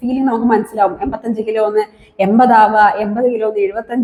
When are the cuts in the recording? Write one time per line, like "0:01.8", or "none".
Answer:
none